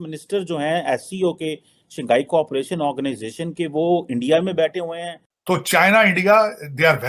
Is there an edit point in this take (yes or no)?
yes